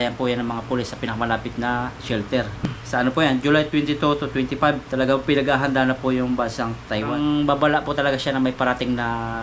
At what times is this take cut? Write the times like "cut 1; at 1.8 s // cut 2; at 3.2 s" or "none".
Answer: cut 1; at 2.8 s // cut 2; at 7.1 s